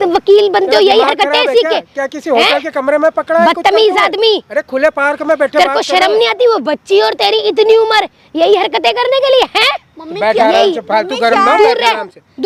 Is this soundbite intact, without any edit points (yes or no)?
yes